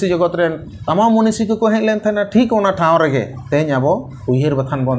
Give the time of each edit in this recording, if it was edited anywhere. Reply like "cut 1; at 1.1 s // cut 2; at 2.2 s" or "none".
cut 1; at 3.4 s // cut 2; at 4.1 s